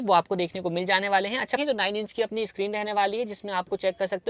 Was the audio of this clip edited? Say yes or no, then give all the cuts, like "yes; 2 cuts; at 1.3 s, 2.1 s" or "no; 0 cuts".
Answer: yes; 1 cut; at 1.6 s